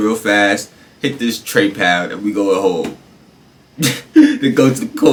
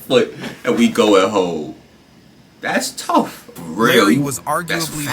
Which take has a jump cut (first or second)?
second